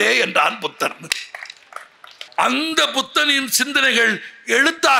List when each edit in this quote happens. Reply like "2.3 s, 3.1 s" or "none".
2.2 s